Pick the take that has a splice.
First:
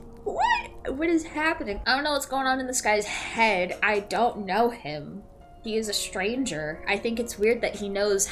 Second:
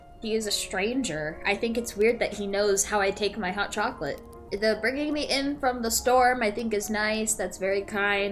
first; 1 cut; at 1.8 s

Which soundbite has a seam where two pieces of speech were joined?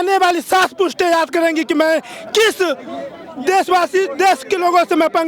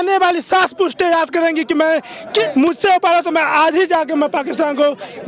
second; 1 cut; at 2.4 s

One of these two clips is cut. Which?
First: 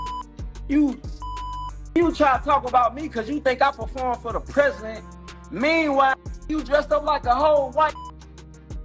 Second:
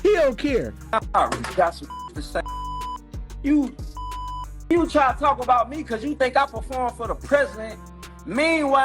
second; 1 cut; at 0.9 s

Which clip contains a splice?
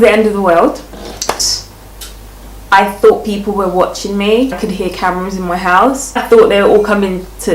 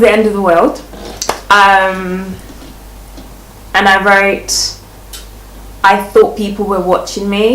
first; 3 cuts; at 1.4 s, 4.6 s, 6.2 s

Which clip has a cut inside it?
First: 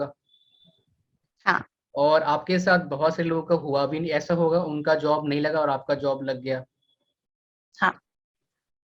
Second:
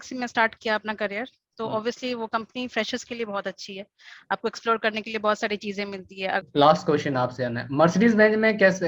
second; 1 cut; at 6.4 s

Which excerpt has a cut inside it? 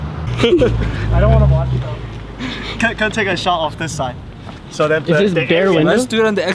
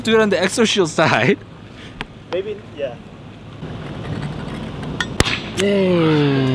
second; 1 cut; at 5.5 s

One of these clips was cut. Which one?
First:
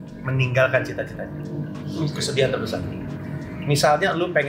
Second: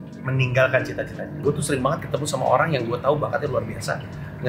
second; 1 cut; at 1.4 s

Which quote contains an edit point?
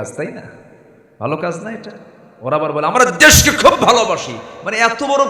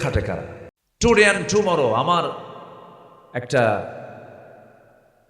second; 1 cut; at 1.2 s

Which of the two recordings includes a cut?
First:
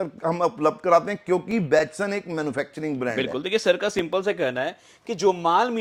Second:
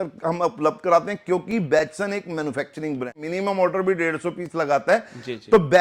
second; 1 cut; at 3.2 s

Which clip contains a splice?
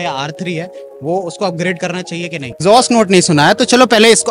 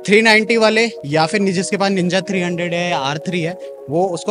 first; 1 cut; at 2.6 s

